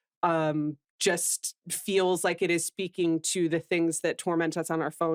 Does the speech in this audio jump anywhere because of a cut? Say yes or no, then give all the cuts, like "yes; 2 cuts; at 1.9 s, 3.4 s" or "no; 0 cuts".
no; 0 cuts